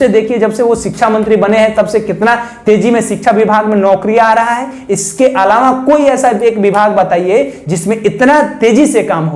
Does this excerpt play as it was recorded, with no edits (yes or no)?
yes